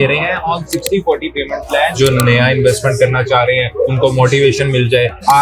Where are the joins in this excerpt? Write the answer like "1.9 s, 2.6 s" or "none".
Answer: 1.9 s, 3.9 s